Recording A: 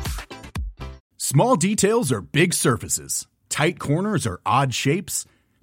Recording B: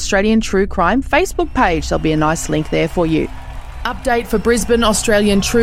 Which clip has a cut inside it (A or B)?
A